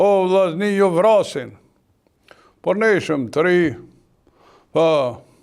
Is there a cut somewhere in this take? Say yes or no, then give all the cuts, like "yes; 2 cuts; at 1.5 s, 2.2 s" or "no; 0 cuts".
no; 0 cuts